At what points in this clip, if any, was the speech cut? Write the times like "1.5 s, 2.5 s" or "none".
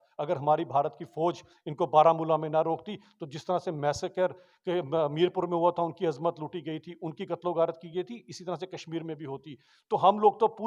none